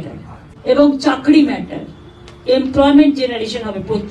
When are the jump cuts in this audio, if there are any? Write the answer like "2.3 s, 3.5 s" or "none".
none